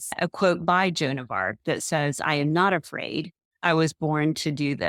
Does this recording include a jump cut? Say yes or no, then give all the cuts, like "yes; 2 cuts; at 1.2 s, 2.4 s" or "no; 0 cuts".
no; 0 cuts